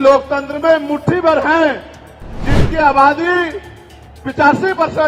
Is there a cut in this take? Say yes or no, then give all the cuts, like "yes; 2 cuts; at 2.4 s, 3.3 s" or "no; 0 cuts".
no; 0 cuts